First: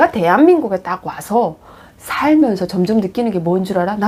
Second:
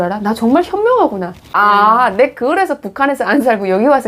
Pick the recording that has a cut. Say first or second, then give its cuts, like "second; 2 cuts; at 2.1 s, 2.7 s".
second; 1 cut; at 1.5 s